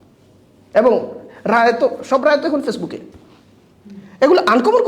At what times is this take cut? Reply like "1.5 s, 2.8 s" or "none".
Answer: none